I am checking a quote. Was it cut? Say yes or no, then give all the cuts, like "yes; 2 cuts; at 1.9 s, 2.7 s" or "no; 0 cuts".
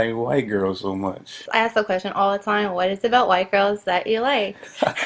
yes; 1 cut; at 1.5 s